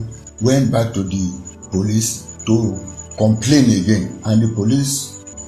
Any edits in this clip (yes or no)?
no